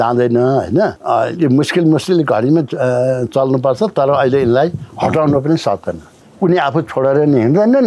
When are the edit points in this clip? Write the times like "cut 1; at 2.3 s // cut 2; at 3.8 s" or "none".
cut 1; at 1.0 s // cut 2; at 6.2 s